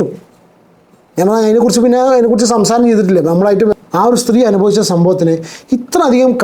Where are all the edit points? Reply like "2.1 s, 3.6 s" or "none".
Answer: 3.7 s